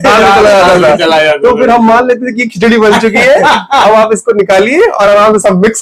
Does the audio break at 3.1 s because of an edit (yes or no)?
no